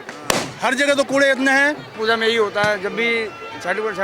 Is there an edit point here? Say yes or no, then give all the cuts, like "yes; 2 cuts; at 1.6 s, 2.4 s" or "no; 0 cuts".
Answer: yes; 1 cut; at 1.9 s